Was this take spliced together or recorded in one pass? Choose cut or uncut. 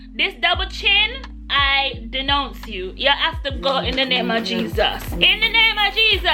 uncut